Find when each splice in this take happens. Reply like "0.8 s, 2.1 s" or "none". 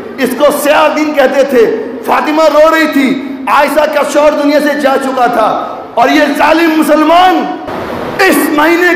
7.8 s